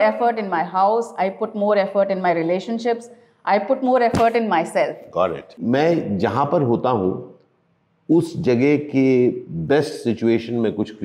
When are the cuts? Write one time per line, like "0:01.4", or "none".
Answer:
0:05.6